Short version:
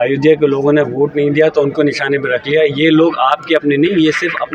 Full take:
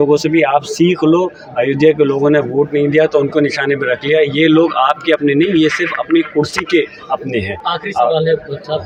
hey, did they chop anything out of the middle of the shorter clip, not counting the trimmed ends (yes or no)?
no